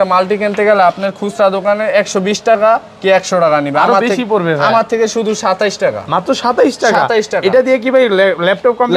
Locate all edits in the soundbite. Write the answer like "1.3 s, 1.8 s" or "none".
none

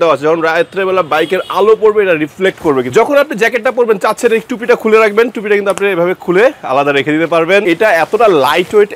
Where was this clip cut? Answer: 2.9 s, 7.6 s

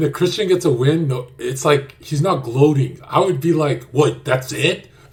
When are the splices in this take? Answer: none

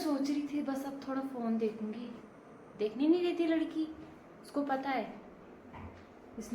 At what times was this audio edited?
none

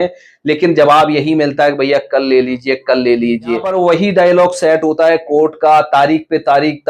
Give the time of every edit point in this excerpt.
3.7 s

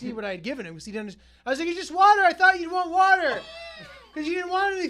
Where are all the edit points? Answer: none

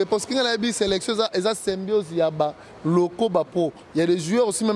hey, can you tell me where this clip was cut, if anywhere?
none

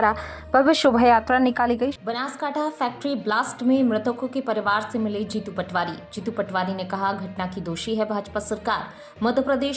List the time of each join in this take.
2.0 s

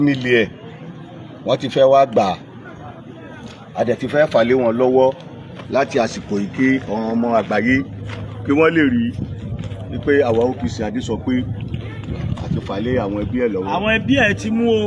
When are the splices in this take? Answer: none

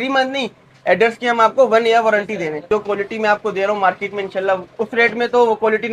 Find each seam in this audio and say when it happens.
2.7 s, 4.7 s

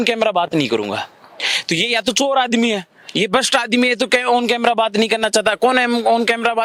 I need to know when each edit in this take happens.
none

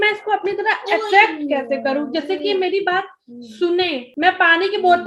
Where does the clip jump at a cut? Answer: 4.0 s

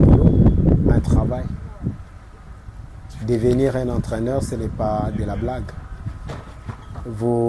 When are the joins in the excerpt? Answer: none

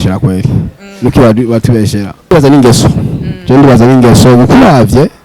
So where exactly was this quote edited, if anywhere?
2.3 s

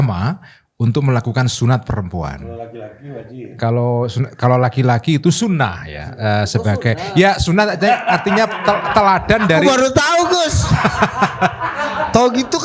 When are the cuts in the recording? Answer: none

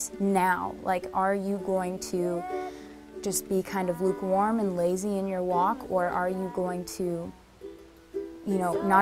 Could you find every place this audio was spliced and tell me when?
1.6 s

